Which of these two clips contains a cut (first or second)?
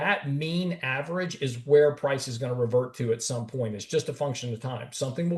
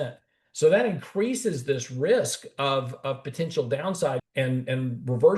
second